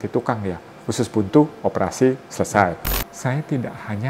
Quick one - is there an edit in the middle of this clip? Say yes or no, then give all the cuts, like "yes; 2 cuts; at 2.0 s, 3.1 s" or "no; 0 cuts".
yes; 1 cut; at 2.9 s